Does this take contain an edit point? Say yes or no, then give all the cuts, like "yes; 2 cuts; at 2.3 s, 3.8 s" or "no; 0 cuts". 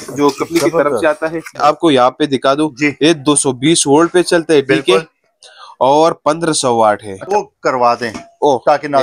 yes; 2 cuts; at 1.6 s, 7.2 s